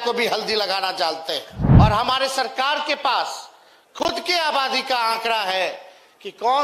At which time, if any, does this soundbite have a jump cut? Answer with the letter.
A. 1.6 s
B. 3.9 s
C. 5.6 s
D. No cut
A